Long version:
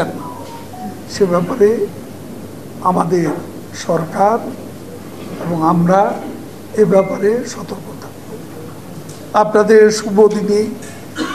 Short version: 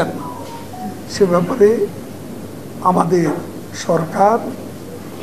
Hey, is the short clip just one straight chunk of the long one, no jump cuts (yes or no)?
yes